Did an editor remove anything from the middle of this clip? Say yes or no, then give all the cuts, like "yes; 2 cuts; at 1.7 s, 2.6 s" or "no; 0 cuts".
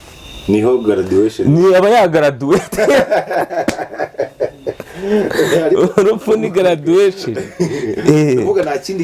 no; 0 cuts